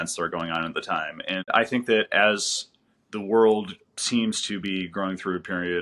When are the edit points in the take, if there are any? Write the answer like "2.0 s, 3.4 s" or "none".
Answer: 1.5 s